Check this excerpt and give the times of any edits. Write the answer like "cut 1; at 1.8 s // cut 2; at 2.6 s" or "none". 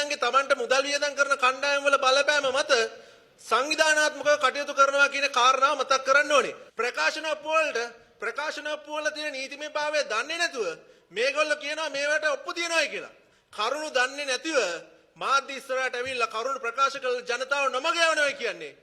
cut 1; at 6.6 s

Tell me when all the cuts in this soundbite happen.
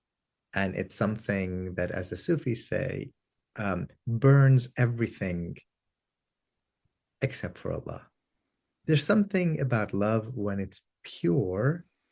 cut 1; at 8.8 s

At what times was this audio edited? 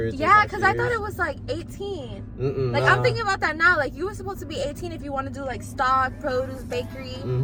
none

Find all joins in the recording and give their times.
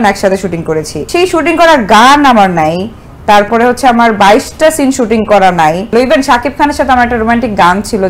cut 1; at 1.0 s // cut 2; at 5.8 s

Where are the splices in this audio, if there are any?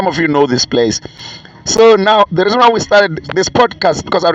cut 1; at 1.1 s

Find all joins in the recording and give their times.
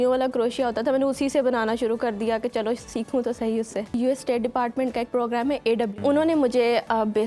cut 1; at 3.9 s // cut 2; at 6.0 s

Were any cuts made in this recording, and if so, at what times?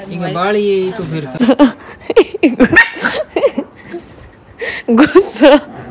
cut 1; at 1.3 s

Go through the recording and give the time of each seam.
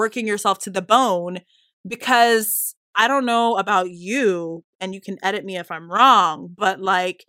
cut 1; at 3.0 s

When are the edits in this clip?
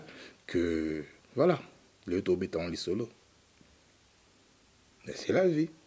none

